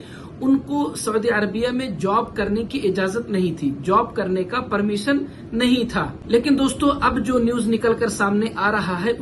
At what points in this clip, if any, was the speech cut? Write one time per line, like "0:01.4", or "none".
none